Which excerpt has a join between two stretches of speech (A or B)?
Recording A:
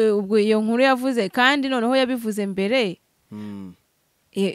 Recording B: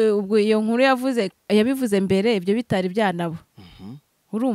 B